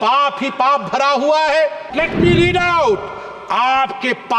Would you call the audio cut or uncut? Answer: cut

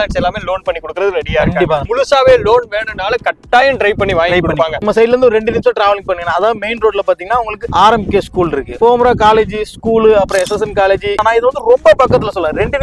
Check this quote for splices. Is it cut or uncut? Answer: cut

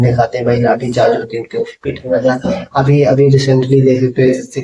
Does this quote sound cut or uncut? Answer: uncut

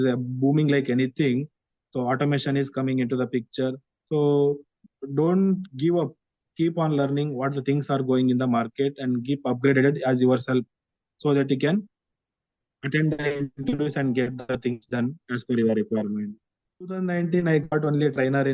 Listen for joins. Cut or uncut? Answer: cut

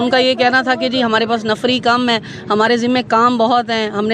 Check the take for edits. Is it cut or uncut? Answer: uncut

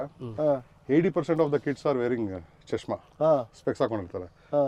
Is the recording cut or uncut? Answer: uncut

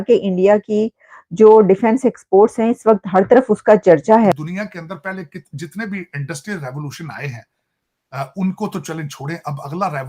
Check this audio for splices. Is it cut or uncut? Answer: cut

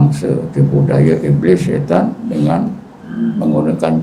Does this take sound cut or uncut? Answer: uncut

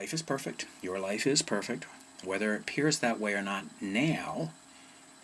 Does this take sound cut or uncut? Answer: uncut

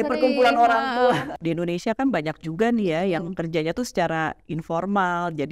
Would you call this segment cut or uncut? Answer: cut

